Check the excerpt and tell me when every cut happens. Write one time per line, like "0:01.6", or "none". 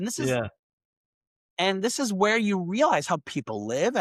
none